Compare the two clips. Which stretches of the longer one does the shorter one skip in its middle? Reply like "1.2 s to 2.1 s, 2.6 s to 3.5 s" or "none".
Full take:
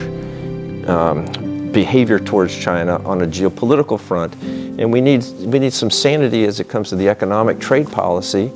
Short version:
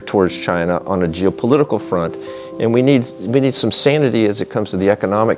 none

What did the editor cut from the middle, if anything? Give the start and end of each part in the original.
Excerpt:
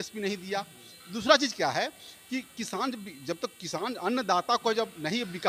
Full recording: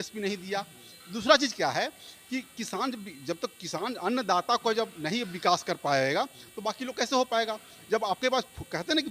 none

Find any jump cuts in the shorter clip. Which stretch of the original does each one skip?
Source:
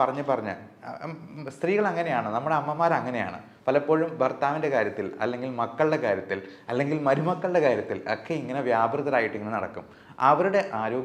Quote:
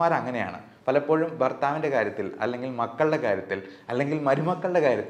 none

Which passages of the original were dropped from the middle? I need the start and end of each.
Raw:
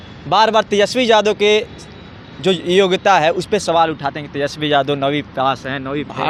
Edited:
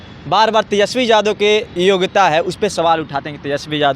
1.7 s to 2.6 s

